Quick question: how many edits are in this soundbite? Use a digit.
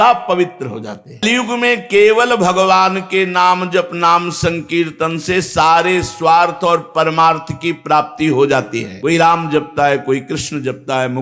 2